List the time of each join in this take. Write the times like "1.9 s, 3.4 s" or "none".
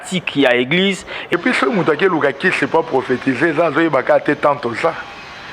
1.3 s